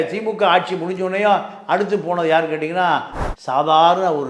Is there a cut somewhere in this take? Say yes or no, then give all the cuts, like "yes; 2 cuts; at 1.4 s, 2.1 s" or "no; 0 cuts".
yes; 1 cut; at 3.2 s